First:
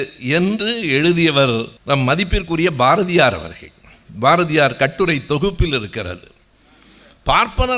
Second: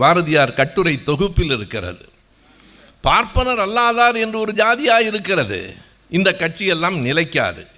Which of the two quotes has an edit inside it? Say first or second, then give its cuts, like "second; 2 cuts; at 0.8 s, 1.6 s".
first; 1 cut; at 1.7 s